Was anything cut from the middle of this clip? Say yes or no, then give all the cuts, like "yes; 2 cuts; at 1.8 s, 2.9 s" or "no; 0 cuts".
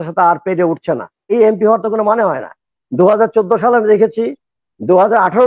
yes; 1 cut; at 1.3 s